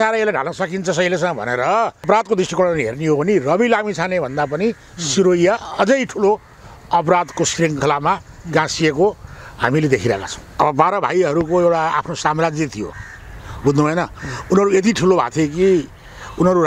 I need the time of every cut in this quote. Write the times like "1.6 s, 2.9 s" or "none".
2.1 s, 10.4 s